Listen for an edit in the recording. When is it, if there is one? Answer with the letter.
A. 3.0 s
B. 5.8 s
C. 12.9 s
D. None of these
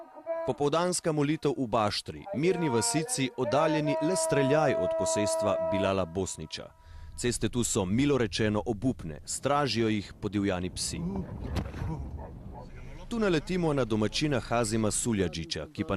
D